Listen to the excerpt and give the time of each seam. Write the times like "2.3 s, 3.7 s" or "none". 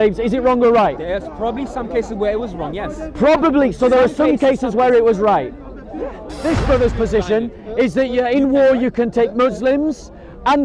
6.3 s